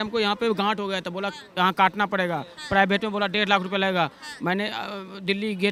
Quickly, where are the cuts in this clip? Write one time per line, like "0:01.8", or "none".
none